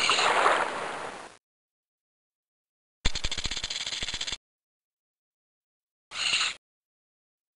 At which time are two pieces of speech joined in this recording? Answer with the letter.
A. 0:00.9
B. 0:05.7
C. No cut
C